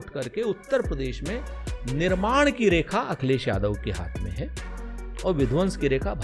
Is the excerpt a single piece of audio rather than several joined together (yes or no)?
yes